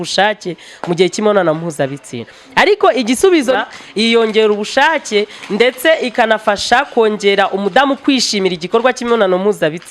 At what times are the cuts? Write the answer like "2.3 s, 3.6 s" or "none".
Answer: 3.6 s